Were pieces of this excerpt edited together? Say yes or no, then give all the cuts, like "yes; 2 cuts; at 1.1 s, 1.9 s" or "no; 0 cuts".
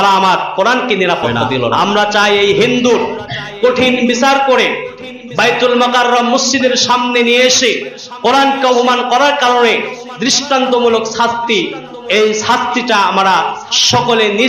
yes; 1 cut; at 1.8 s